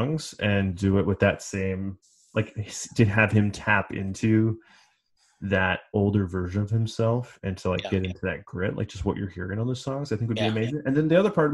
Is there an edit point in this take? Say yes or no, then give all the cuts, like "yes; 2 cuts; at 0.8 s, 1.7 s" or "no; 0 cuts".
no; 0 cuts